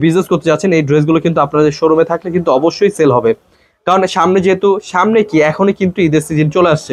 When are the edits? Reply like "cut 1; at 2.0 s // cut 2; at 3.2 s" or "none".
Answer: none